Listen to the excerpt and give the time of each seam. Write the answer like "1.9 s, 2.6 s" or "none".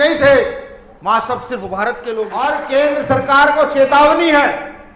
2.3 s